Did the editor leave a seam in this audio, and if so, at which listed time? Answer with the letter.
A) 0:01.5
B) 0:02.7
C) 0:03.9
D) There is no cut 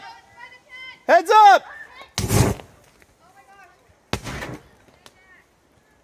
C